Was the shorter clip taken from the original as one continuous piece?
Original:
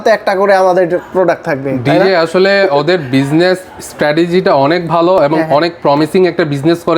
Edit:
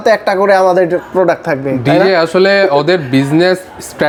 yes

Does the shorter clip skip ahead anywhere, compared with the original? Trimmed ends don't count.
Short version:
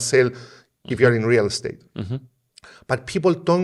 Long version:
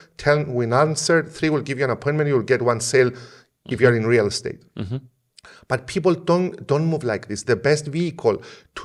no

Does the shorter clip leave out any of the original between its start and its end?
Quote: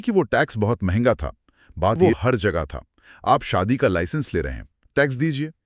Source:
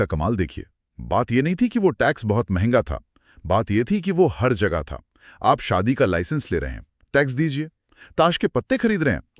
yes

